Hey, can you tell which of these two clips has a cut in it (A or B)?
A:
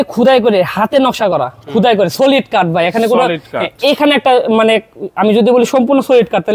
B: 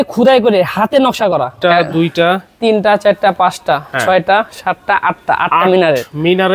B